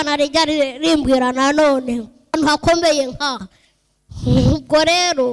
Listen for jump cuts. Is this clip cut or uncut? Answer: cut